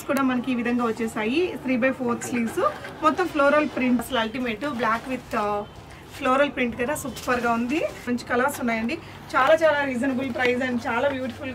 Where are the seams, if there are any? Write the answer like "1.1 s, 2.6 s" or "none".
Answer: 4.0 s, 8.0 s